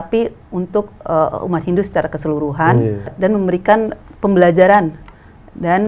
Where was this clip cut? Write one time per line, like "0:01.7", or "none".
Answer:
0:03.1
0:04.0